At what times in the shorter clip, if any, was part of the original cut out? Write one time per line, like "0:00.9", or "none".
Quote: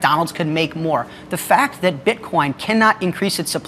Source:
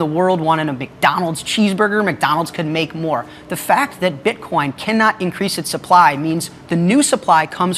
none